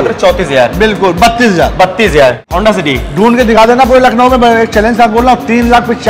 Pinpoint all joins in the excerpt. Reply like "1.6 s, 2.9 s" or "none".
2.5 s